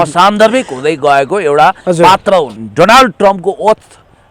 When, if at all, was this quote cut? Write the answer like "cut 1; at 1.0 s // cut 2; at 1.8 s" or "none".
cut 1; at 2.6 s